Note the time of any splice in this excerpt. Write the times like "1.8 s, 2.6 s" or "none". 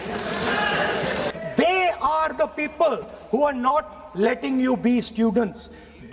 1.3 s